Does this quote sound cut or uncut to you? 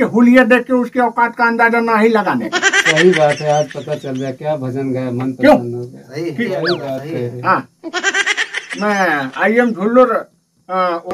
cut